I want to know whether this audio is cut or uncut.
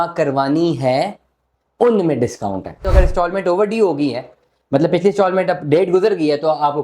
cut